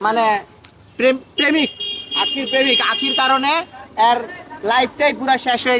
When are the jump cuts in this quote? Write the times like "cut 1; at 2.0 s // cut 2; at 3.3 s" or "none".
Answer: none